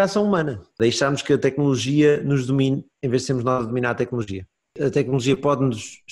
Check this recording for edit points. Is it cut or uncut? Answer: cut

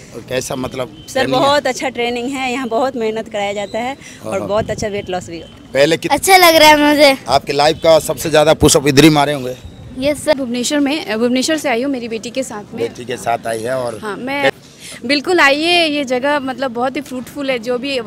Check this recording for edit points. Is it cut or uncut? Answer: cut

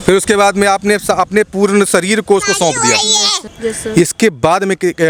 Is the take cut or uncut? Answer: uncut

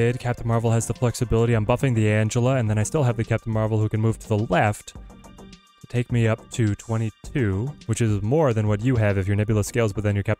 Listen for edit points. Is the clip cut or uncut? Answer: uncut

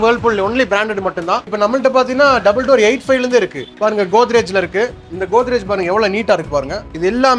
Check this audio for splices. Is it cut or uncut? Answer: cut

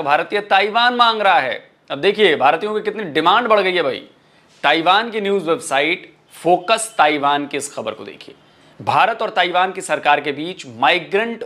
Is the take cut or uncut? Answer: uncut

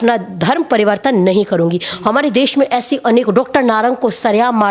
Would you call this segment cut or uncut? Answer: uncut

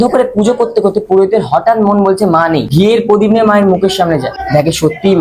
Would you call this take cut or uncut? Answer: cut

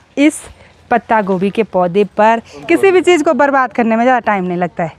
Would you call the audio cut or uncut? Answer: cut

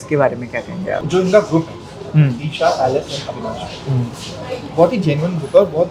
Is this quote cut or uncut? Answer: cut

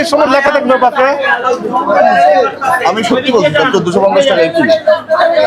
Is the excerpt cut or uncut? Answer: uncut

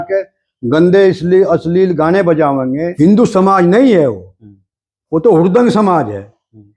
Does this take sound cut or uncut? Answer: cut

